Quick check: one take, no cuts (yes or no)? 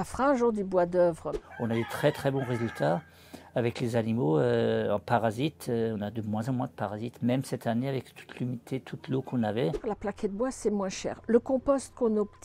no